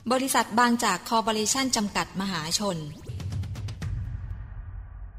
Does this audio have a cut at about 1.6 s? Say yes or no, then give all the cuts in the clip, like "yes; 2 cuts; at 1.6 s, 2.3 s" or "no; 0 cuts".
no; 1 cut; at 3.1 s